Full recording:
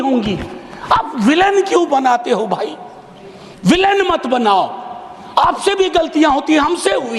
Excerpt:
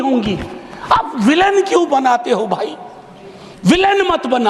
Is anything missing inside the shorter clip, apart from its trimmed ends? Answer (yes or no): no